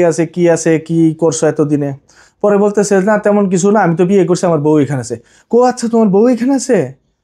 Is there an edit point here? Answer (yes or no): no